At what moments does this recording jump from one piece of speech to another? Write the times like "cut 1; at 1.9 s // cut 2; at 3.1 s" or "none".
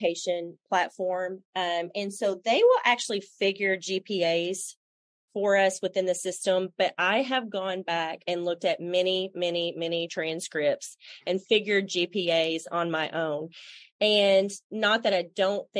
none